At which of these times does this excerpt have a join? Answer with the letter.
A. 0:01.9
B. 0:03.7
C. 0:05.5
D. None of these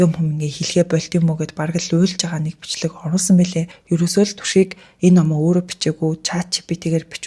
B